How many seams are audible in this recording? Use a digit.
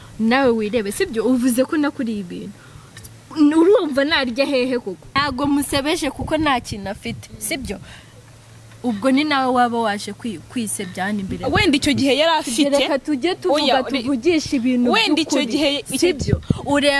1